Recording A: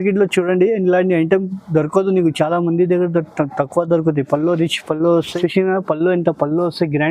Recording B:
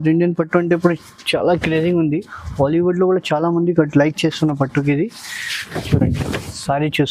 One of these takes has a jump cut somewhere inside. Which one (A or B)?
A